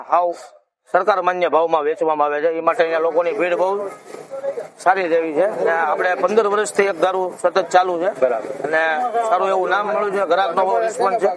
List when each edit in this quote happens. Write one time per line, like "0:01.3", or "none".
none